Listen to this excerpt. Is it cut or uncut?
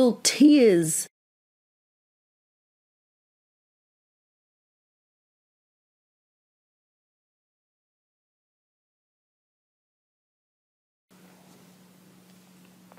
uncut